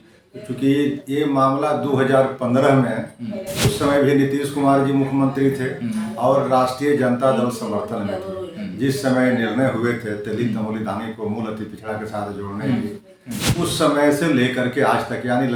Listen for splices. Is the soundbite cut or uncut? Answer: uncut